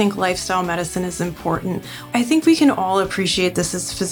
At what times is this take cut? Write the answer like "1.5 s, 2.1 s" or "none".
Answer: 2.1 s

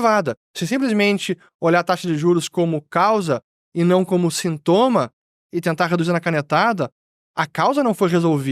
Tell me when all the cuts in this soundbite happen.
none

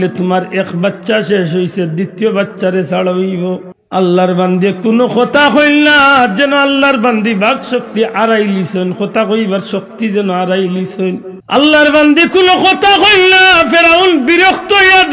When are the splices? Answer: 3.7 s, 11.3 s

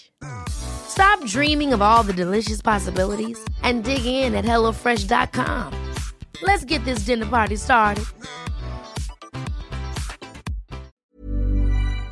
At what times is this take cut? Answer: 10.9 s

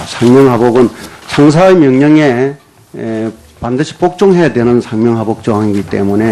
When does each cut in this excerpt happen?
3.8 s

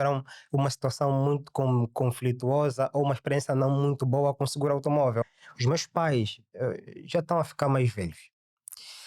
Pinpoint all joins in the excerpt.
5.3 s

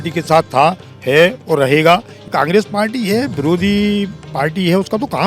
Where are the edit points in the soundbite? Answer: 2.1 s

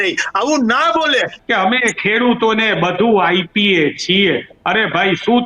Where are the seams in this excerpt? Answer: 1.3 s

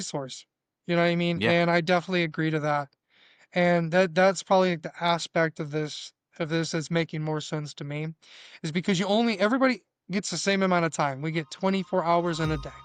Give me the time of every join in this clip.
none

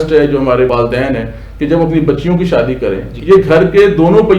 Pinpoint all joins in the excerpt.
3.1 s

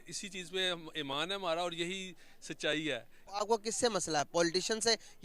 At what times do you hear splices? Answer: 3.2 s

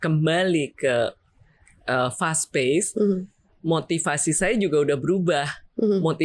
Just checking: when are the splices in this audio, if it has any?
none

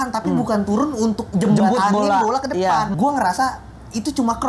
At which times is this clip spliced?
1.2 s, 2.9 s

